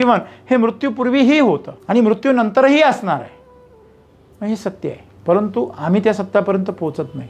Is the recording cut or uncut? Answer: cut